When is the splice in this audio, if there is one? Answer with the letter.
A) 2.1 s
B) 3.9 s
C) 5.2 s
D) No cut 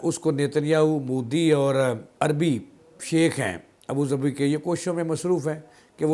A